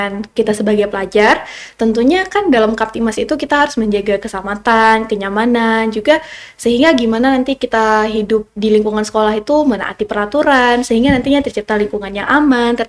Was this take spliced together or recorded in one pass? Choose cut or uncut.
uncut